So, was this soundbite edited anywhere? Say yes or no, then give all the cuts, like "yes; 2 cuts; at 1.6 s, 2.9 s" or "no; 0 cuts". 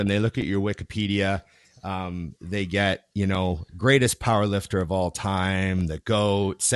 no; 0 cuts